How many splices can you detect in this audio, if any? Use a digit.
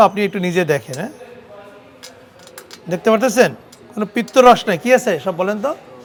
0